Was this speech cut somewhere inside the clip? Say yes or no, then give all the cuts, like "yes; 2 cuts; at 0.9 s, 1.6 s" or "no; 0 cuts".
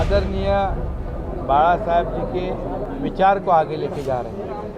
yes; 1 cut; at 2.9 s